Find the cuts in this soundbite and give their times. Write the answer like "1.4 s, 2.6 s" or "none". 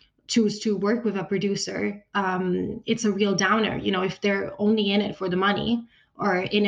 none